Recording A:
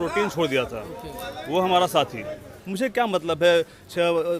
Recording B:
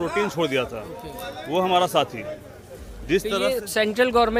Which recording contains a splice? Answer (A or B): A